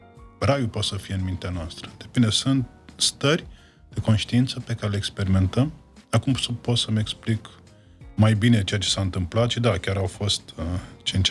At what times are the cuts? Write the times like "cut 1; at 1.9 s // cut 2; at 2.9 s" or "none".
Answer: none